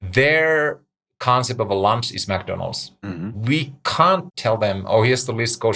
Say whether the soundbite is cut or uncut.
cut